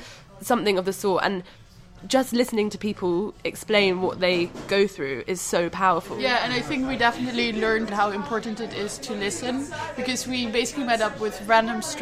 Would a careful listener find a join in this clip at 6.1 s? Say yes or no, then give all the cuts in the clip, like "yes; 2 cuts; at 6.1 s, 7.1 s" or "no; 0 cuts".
yes; 2 cuts; at 6.1 s, 7.9 s